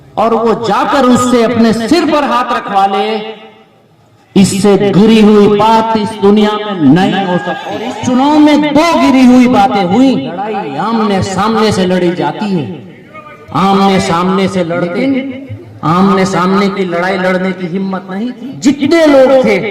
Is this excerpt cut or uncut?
cut